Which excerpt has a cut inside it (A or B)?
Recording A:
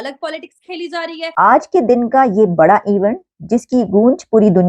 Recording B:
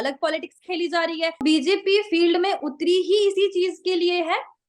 A